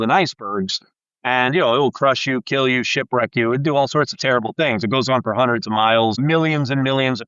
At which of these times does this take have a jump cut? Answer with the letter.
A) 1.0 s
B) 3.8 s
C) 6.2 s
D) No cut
C